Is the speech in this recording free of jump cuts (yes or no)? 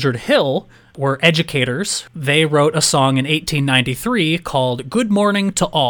no